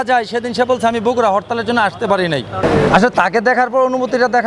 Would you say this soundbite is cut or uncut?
cut